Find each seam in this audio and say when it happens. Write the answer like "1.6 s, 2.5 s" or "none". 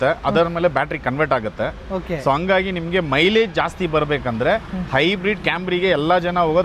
none